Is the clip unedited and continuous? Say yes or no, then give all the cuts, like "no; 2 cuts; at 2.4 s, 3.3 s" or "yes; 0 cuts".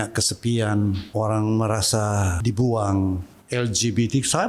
no; 3 cuts; at 1.0 s, 2.3 s, 3.3 s